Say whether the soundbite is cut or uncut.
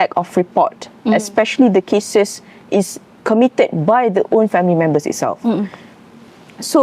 uncut